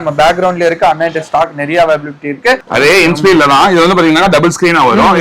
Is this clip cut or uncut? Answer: cut